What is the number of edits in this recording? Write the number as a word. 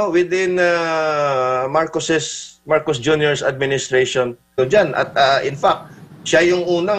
one